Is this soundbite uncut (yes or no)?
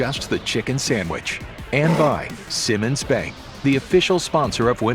no